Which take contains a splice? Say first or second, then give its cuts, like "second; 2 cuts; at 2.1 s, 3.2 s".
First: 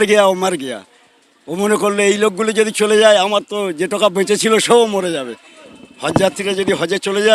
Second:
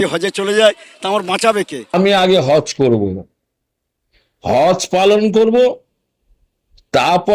second; 1 cut; at 1.9 s